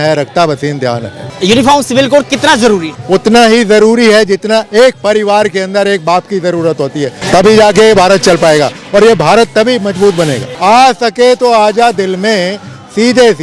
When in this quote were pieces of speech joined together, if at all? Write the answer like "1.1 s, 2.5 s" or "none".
1.3 s, 2.9 s, 7.2 s, 10.5 s